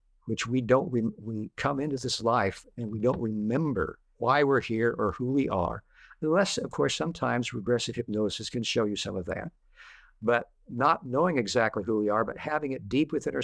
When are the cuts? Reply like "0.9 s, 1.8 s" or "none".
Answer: 4.0 s